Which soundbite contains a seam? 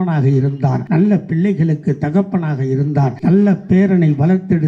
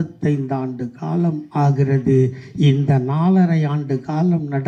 first; 2 cuts; at 0.8 s, 3.1 s

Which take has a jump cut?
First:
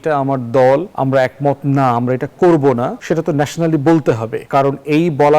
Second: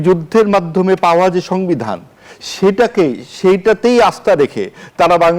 first; 3 cuts; at 0.9 s, 3.0 s, 4.3 s

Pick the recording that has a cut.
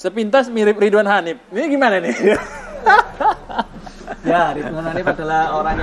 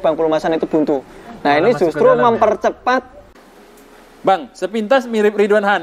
second; 1 cut; at 3.3 s

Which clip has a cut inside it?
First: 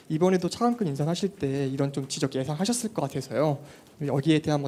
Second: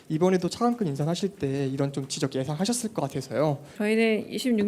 second; 1 cut; at 3.7 s

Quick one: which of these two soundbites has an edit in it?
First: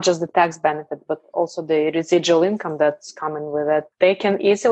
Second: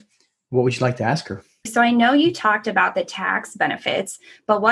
second; 1 cut; at 1.7 s

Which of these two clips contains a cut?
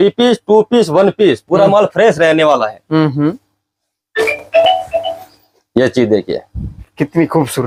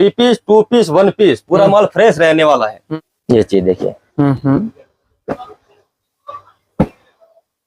second; 1 cut; at 2.8 s

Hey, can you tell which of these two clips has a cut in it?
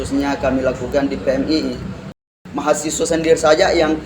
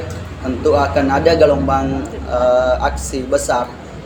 first; 1 cut; at 2.1 s

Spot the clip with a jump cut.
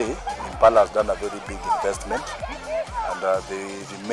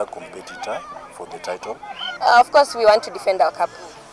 second; 1 cut; at 2.1 s

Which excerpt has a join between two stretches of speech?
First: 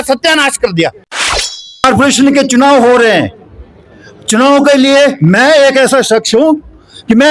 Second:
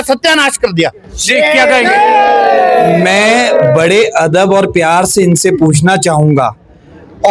first; 1 cut; at 1.3 s

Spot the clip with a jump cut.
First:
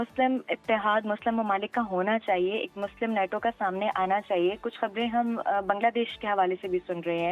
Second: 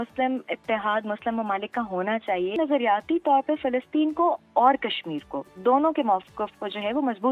second; 1 cut; at 2.6 s

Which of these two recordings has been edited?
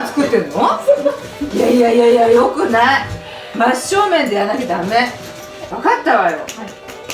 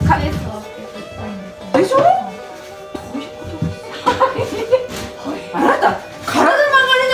first; 2 cuts; at 1.5 s, 5.7 s

